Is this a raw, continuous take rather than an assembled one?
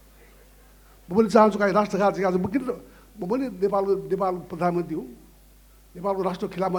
yes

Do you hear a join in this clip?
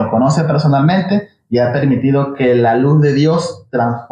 no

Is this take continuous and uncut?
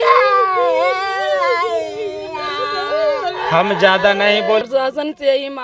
no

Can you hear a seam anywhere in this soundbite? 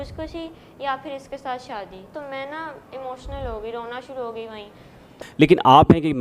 yes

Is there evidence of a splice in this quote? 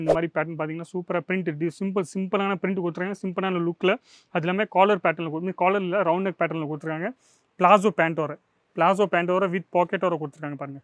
no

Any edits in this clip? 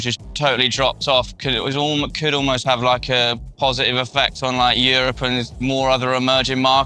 no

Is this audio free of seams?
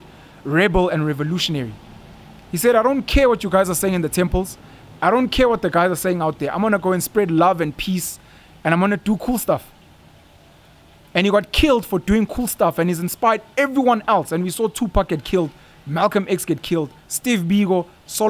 yes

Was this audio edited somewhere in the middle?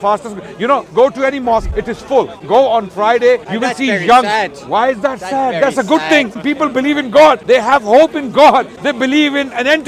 yes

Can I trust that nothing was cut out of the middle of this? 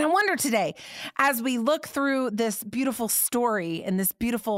yes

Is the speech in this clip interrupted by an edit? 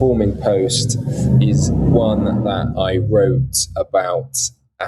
no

